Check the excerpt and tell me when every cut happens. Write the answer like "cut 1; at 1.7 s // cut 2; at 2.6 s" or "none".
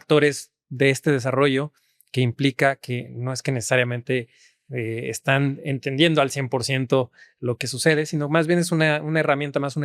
none